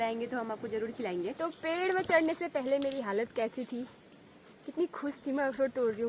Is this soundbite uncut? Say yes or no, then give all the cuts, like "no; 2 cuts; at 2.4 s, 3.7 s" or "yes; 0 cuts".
no; 1 cut; at 1.3 s